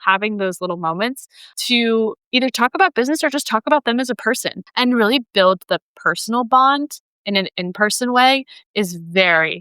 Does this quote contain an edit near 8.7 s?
no; 2 cuts; at 1.5 s, 4.6 s

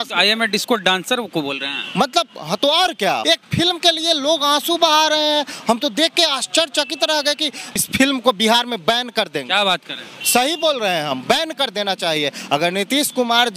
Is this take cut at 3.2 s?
yes; 2 cuts; at 3.2 s, 7.9 s

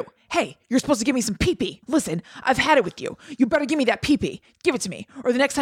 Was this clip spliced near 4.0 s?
no; 1 cut; at 1.8 s

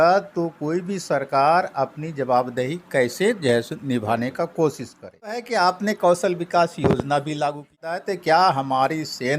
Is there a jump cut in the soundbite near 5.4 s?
yes; 2 cuts; at 5.4 s, 7.9 s

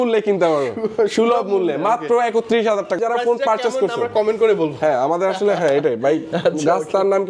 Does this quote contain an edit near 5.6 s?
no; 1 cut; at 3.0 s

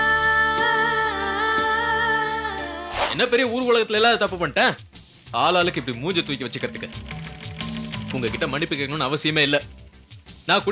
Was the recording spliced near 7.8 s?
no; 1 cut; at 2.8 s

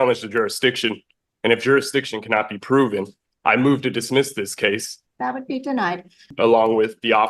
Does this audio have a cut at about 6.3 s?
yes; 2 cuts; at 4.9 s, 6.3 s

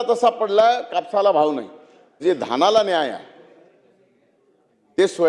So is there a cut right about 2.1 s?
yes; 1 cut; at 2.1 s

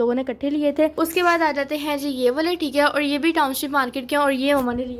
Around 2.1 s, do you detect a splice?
no; 1 cut; at 0.9 s

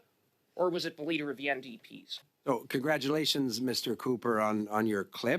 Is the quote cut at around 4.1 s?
no; 1 cut; at 2.4 s

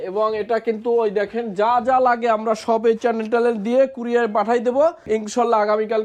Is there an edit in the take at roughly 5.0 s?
yes; 1 cut; at 5.0 s

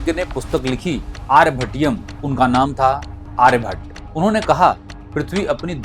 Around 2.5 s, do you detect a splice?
no; 0 cuts

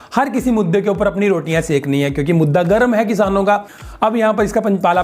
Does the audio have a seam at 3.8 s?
yes; 1 cut; at 3.8 s

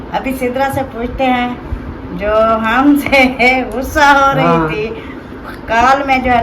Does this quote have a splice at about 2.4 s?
no; 0 cuts

